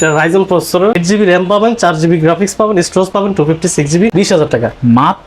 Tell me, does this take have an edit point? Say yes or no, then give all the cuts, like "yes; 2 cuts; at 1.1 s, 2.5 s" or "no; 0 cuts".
yes; 2 cuts; at 0.9 s, 4.1 s